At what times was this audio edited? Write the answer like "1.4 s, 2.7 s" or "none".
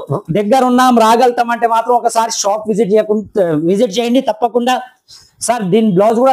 none